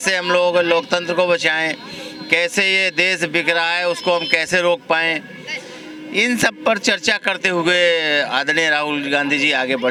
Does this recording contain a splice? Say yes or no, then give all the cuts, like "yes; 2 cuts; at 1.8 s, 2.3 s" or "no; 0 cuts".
no; 0 cuts